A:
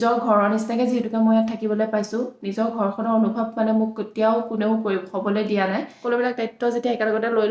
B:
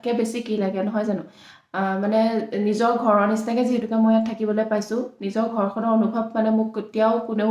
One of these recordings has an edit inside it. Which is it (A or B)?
A